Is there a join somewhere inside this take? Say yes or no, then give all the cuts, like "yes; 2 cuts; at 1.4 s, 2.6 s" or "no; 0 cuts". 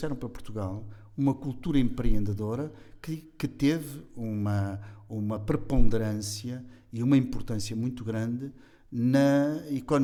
no; 0 cuts